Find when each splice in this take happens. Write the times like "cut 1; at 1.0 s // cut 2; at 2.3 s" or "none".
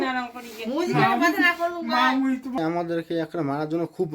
cut 1; at 2.6 s

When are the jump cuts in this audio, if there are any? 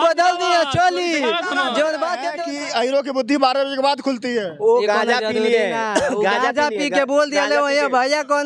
cut 1; at 2.4 s

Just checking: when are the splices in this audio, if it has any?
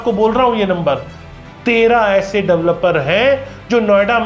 none

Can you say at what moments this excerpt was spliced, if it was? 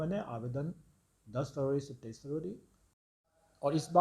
cut 1; at 2.9 s

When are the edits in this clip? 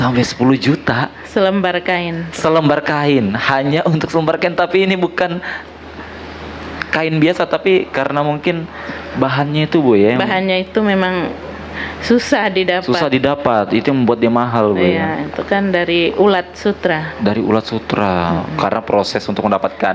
none

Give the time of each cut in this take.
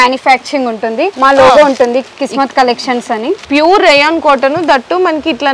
cut 1; at 1.1 s // cut 2; at 3.4 s

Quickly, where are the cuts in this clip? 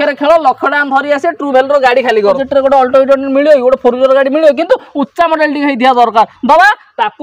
cut 1; at 2.4 s

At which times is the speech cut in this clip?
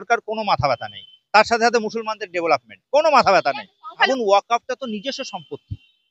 cut 1; at 4.1 s

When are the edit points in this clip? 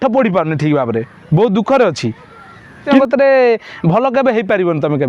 cut 1; at 2.9 s

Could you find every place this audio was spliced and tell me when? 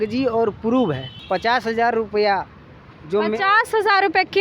cut 1; at 1.1 s

